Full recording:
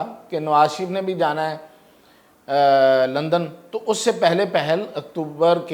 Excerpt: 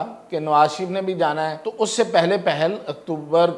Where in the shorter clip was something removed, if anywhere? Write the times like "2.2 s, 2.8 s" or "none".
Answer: 1.6 s